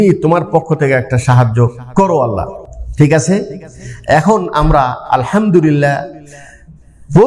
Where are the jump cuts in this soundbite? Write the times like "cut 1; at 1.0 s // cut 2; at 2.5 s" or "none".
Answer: none